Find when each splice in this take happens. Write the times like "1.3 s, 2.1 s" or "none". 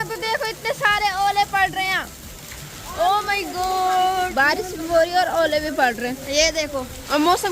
none